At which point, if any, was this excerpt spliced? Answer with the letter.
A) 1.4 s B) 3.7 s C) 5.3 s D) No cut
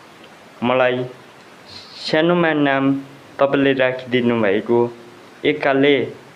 D